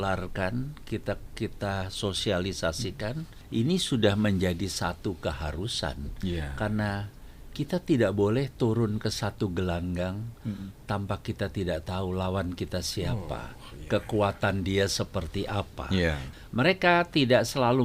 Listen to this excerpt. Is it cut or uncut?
cut